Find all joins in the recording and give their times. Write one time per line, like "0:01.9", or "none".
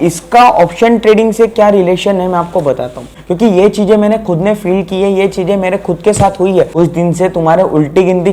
0:03.0
0:06.7